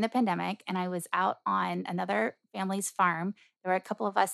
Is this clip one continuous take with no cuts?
yes; 0 cuts

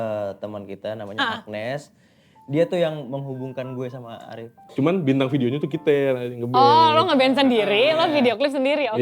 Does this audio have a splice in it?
yes; 1 cut; at 4.6 s

